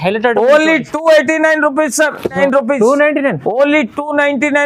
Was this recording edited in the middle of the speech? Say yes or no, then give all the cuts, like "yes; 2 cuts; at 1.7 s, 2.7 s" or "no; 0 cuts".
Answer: yes; 1 cut; at 2.4 s